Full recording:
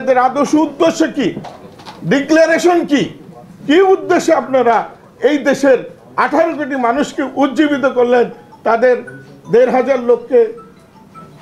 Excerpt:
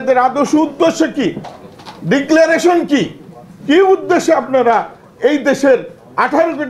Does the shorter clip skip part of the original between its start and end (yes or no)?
no